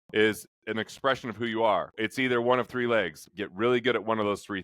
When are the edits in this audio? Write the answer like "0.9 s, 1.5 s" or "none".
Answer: 1.9 s, 3.3 s

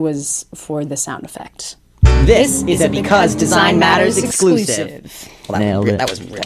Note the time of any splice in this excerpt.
2.1 s

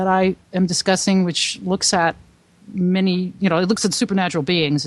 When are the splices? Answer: none

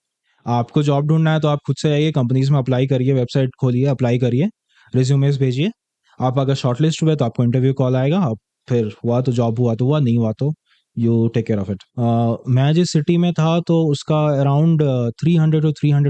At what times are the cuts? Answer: 11.8 s

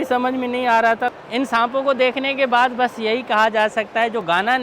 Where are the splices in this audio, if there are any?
1.2 s

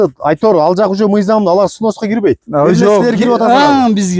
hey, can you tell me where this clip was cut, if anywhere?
none

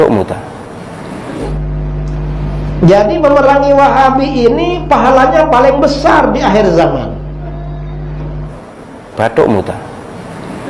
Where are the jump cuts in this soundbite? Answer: 1.5 s

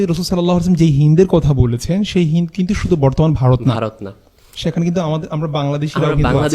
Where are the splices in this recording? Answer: none

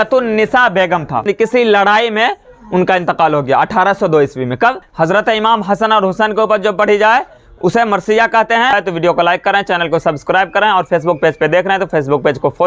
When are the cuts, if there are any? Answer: 1.3 s, 4.9 s, 8.7 s

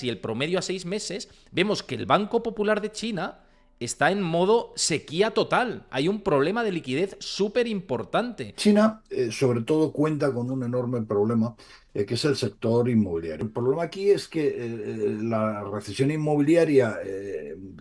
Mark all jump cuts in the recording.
8.6 s, 13.5 s

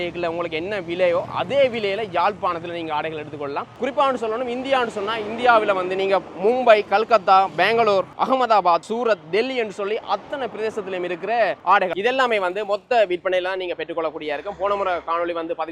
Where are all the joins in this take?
none

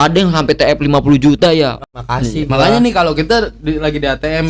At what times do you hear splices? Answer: 1.8 s

